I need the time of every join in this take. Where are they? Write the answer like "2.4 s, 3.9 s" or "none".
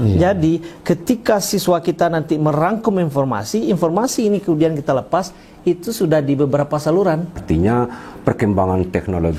7.4 s